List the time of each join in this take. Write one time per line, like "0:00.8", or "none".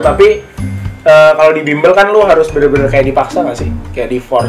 none